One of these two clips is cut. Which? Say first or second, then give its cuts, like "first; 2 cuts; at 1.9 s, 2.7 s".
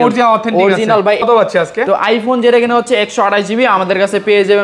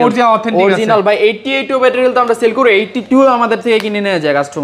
first; 1 cut; at 1.2 s